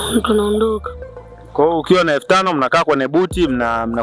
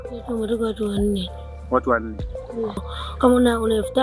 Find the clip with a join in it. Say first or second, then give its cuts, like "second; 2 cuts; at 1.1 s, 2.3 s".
second; 1 cut; at 2.8 s